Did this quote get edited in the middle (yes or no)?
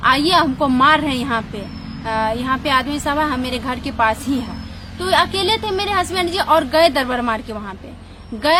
no